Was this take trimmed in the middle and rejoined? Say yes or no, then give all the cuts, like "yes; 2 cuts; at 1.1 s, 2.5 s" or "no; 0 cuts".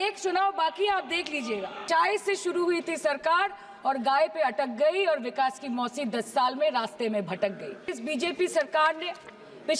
yes; 2 cuts; at 1.8 s, 7.9 s